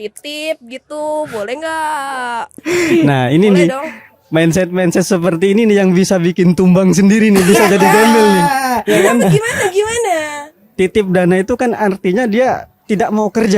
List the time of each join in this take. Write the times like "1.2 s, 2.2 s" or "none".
2.6 s